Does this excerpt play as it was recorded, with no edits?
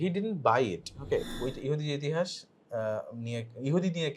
no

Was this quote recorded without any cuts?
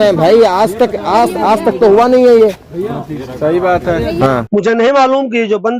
no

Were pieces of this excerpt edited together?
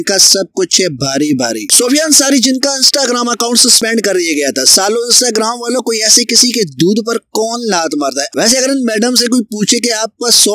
yes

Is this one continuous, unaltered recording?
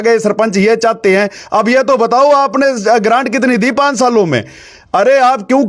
yes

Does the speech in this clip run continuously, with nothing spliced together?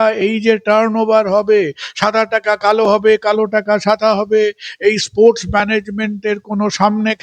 yes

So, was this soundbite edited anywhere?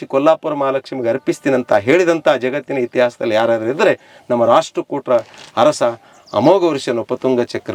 no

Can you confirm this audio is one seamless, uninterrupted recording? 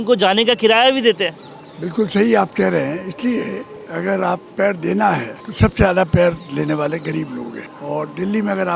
no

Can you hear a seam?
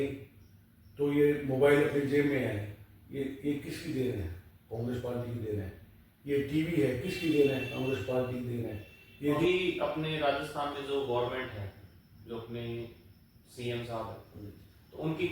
yes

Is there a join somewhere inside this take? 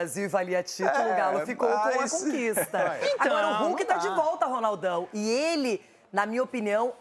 no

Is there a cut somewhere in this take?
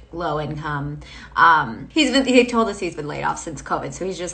yes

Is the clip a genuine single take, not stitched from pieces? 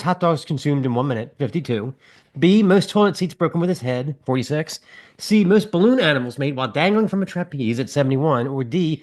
yes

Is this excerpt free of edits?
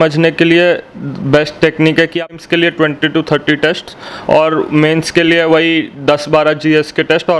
no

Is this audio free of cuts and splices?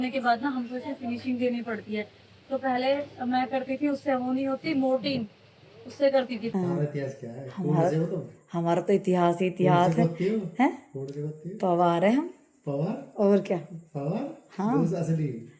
no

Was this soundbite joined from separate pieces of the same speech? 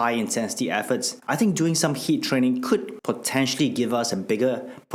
no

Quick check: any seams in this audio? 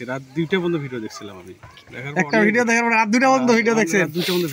no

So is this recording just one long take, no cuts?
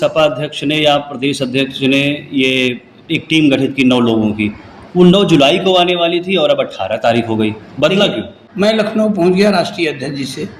no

